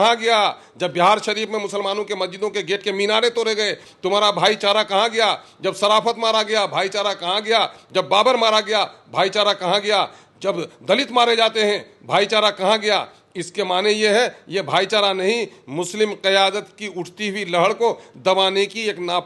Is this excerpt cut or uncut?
uncut